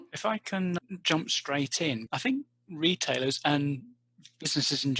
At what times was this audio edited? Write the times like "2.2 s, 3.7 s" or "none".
none